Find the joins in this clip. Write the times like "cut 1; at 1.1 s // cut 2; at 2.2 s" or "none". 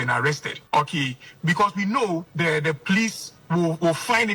cut 1; at 2.3 s // cut 2; at 3.3 s